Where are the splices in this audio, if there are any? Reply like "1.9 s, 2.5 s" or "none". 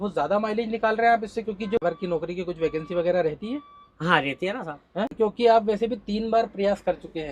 1.8 s, 5.1 s